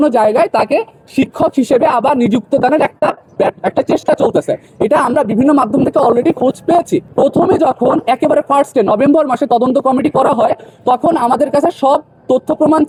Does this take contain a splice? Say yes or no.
no